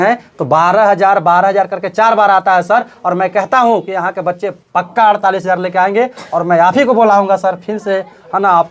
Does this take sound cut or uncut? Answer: uncut